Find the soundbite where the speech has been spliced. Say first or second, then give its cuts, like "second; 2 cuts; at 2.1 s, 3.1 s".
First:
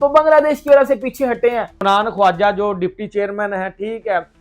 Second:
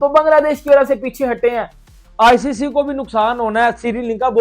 second; 1 cut; at 1.7 s